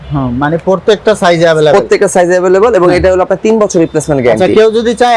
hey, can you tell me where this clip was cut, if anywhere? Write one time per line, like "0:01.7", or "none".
none